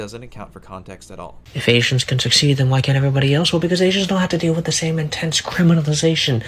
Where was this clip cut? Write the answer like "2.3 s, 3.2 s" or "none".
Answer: 1.4 s